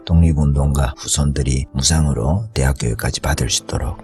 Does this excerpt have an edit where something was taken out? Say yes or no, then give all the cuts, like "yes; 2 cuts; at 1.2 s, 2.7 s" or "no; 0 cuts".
yes; 1 cut; at 1.0 s